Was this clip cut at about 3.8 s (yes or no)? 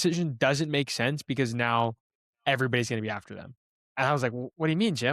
yes